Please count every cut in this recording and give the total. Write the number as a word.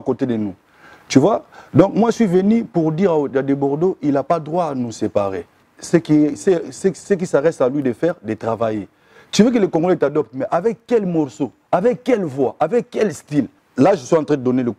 two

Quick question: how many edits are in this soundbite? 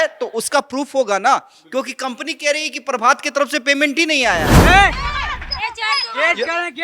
one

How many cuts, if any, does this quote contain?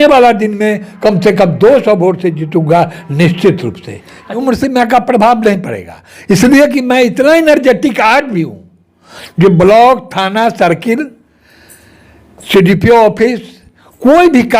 one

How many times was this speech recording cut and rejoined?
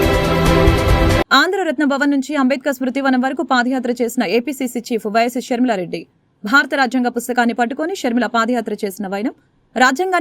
one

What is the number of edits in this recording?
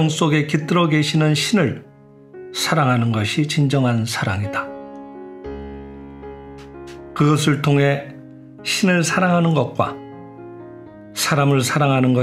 two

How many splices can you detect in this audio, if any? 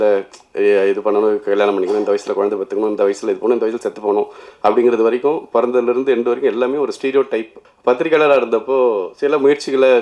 one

